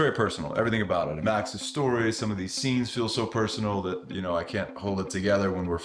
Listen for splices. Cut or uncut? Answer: cut